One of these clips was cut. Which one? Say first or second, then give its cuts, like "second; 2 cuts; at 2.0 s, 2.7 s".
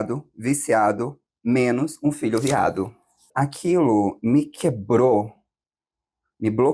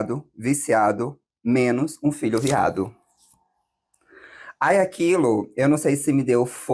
first; 1 cut; at 3.3 s